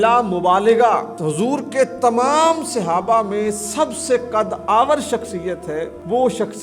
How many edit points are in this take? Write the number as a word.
zero